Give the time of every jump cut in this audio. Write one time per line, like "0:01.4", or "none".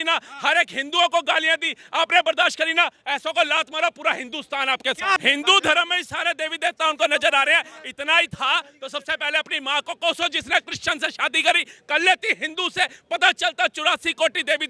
0:05.2